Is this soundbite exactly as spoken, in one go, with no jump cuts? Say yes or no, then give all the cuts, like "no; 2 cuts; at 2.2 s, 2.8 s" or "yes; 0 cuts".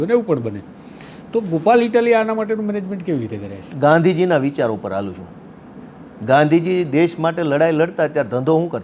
yes; 0 cuts